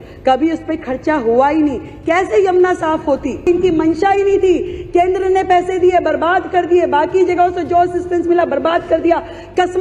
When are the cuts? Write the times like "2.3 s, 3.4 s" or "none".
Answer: 3.5 s